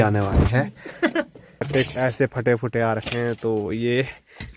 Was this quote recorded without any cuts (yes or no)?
no